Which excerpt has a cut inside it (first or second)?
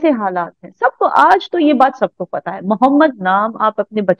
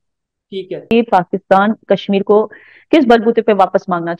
second